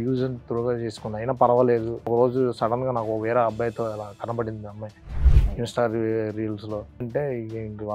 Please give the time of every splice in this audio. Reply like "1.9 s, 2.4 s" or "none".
2.1 s, 7.1 s